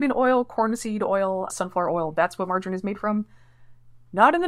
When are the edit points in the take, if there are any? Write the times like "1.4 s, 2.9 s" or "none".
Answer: none

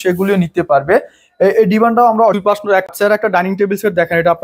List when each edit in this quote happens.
2.4 s

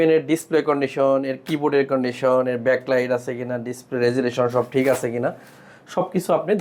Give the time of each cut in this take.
none

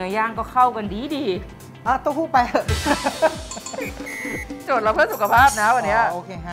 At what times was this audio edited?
none

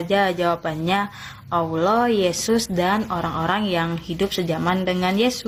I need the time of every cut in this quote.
none

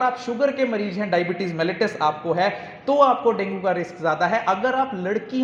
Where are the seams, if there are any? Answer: none

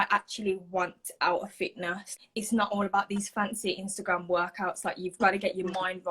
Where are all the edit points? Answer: 2.1 s

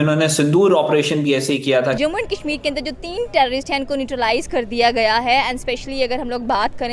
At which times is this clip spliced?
2.0 s

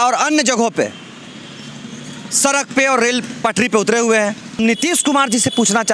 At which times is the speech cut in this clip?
4.6 s

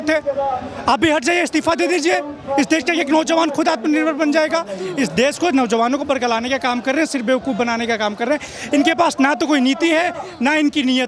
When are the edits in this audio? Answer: none

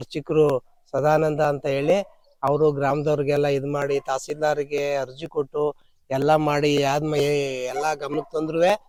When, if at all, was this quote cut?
none

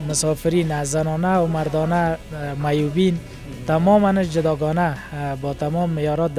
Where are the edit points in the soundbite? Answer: none

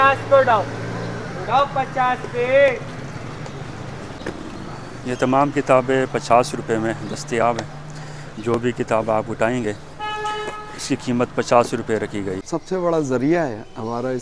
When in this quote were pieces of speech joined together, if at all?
4.2 s, 12.4 s

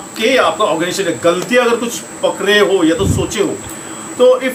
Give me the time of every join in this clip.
none

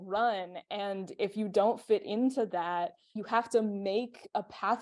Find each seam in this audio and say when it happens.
none

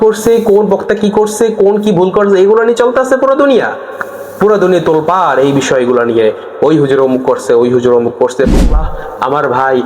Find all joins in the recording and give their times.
8.9 s

